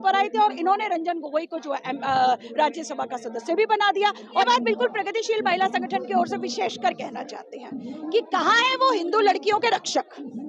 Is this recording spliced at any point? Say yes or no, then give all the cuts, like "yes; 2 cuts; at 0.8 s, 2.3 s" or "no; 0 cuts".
yes; 1 cut; at 4.4 s